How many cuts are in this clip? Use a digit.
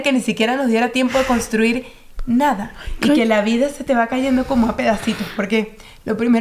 0